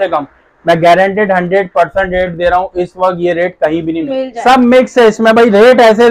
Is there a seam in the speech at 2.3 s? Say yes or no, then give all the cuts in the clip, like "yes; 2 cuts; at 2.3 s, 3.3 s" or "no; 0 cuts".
no; 1 cut; at 4.1 s